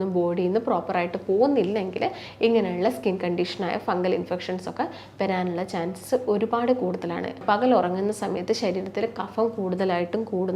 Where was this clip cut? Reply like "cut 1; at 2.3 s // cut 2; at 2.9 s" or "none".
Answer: cut 1; at 7.4 s